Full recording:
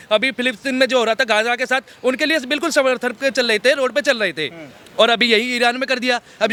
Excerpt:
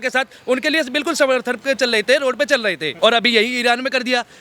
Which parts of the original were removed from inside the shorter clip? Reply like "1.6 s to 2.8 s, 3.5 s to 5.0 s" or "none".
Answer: 4.4 s to 4.8 s